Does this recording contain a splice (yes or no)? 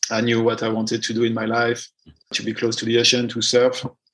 yes